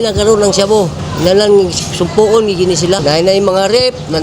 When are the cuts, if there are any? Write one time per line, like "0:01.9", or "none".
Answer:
0:01.0
0:03.0